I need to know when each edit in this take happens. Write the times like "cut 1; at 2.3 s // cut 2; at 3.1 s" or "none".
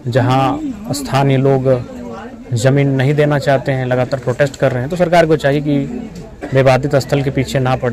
none